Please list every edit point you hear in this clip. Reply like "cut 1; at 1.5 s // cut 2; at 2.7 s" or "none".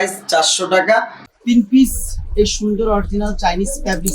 cut 1; at 1.2 s